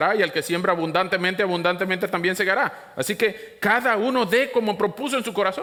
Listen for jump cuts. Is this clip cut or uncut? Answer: uncut